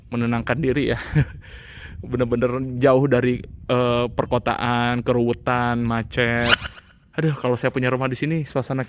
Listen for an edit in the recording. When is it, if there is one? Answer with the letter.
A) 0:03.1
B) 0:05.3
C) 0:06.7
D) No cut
C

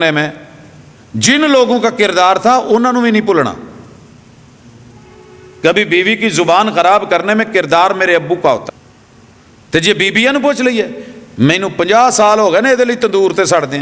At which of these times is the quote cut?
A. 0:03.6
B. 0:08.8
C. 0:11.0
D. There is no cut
B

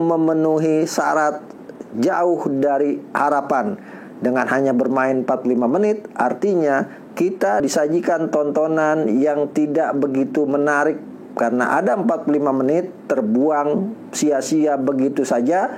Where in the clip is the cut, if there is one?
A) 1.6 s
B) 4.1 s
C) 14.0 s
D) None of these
D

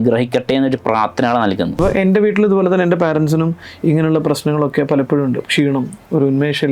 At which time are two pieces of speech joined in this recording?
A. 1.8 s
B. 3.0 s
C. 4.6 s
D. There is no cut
A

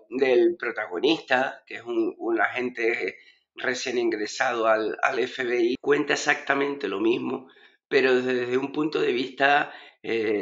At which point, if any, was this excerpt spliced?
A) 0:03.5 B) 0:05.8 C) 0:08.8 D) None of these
B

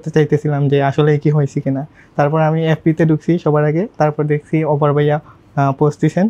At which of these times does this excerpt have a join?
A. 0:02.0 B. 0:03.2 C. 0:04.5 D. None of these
D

